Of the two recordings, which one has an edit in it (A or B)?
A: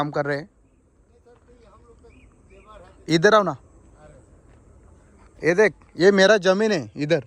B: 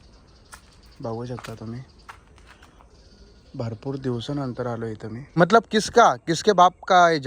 B